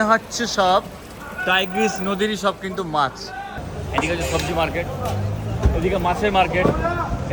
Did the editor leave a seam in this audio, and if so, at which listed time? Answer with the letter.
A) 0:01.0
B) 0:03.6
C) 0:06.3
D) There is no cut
B